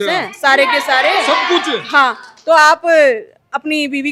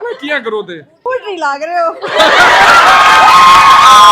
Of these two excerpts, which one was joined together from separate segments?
second; 1 cut; at 1.0 s

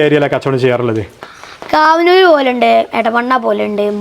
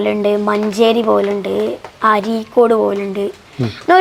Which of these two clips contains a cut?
first; 1 cut; at 1.2 s

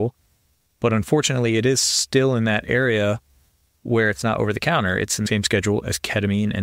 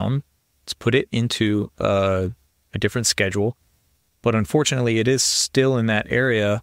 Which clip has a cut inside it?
first; 1 cut; at 5.3 s

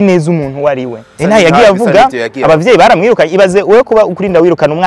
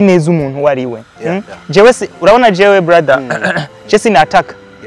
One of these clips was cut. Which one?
first; 1 cut; at 1.1 s

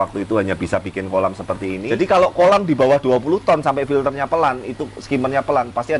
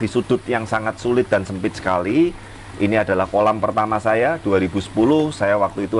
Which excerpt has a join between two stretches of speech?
first; 1 cut; at 1.8 s

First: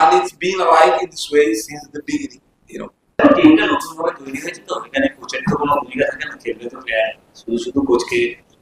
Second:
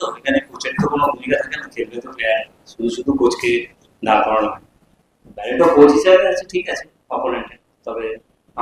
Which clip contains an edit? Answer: first; 1 cut; at 3.2 s

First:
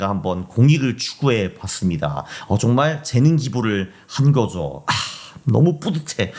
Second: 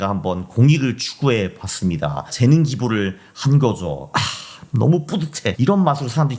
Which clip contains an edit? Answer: second; 2 cuts; at 2.3 s, 5.6 s

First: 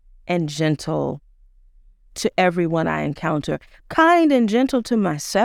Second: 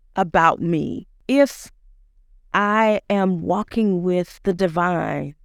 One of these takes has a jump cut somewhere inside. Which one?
second; 2 cuts; at 1.1 s, 4.3 s

